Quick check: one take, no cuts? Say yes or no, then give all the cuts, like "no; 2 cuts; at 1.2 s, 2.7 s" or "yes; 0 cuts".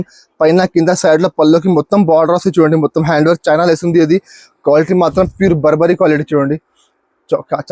yes; 0 cuts